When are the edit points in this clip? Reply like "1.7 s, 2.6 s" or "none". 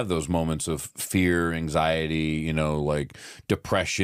none